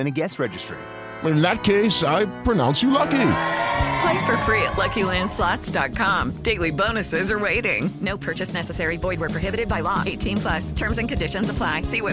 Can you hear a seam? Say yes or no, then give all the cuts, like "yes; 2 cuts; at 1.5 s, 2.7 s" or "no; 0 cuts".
no; 0 cuts